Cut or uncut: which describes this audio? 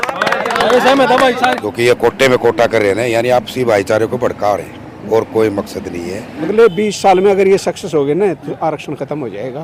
cut